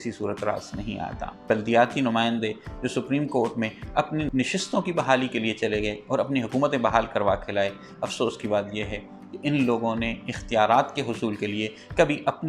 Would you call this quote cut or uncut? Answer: cut